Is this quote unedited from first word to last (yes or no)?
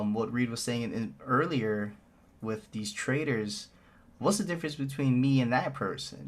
yes